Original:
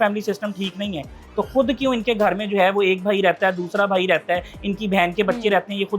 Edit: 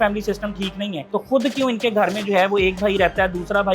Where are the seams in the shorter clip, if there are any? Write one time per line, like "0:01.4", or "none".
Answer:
0:01.0